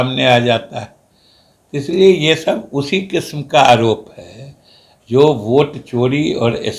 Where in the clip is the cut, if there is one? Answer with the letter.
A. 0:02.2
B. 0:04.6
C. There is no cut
C